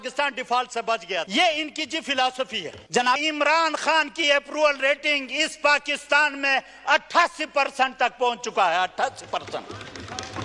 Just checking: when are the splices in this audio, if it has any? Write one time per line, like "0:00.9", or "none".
0:01.3
0:03.2